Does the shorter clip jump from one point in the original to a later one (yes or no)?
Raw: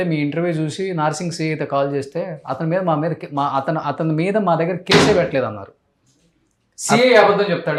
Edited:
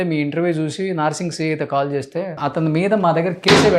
yes